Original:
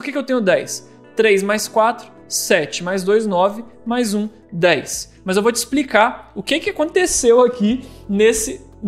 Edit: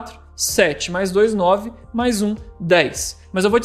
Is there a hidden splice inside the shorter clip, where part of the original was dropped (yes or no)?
no